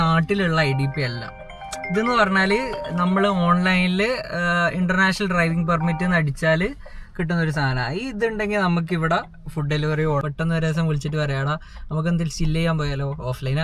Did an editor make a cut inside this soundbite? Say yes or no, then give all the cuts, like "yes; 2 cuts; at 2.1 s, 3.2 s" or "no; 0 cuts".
yes; 1 cut; at 10.2 s